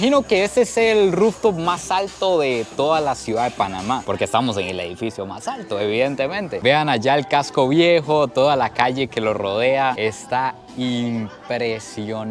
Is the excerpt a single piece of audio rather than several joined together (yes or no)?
yes